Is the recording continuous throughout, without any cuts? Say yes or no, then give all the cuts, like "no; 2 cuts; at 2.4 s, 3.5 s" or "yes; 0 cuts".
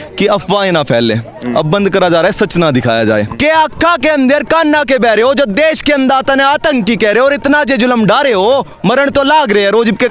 no; 1 cut; at 3.3 s